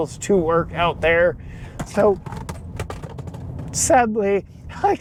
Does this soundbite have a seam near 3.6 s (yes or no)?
no